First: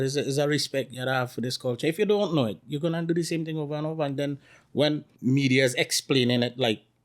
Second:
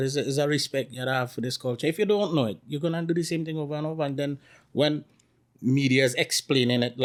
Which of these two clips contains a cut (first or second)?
first